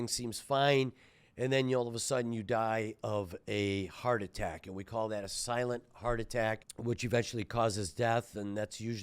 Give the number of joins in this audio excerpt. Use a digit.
1